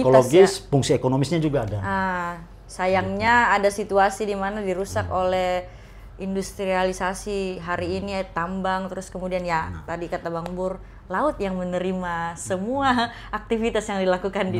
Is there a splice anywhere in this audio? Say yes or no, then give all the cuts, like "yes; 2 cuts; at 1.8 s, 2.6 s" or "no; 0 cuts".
no; 0 cuts